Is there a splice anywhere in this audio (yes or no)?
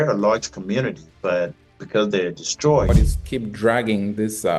yes